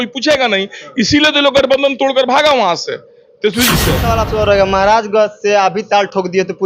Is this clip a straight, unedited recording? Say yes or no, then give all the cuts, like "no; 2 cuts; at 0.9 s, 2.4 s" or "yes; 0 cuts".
no; 1 cut; at 4.0 s